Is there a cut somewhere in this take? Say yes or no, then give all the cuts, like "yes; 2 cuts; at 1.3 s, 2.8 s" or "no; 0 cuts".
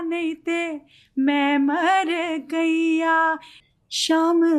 yes; 1 cut; at 3.5 s